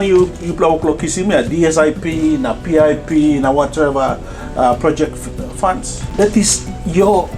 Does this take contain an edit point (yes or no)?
yes